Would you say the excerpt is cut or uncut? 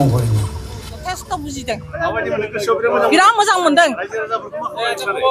cut